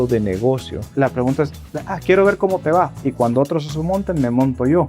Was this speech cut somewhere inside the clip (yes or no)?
yes